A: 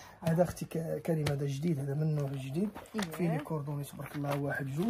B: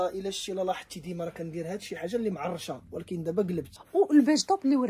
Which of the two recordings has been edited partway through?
B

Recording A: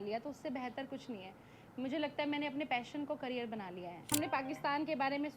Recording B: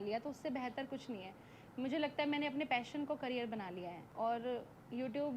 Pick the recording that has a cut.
A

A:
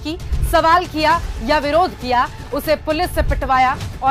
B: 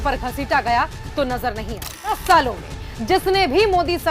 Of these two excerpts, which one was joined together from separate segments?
B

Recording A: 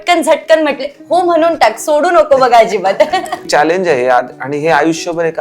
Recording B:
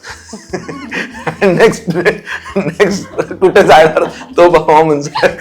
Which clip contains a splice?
A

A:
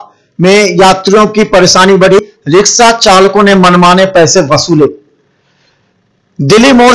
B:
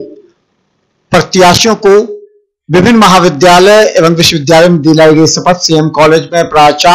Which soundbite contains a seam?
A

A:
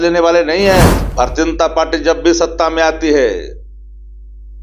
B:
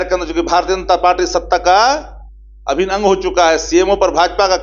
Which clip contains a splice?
A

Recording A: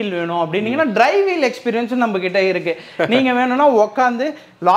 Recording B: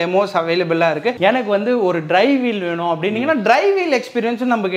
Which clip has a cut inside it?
B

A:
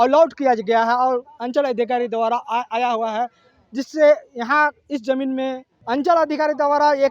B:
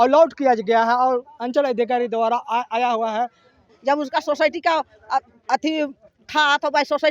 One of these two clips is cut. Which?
B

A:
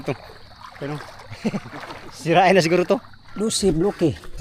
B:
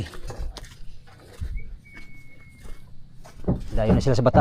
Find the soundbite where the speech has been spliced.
A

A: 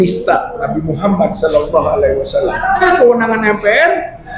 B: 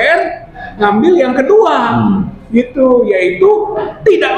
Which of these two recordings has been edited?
A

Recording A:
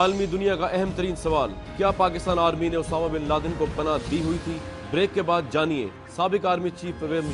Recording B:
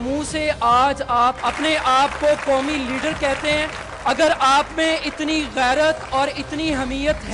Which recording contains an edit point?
B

